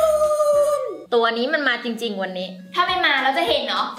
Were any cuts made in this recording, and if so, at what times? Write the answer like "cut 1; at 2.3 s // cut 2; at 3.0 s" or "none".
cut 1; at 0.9 s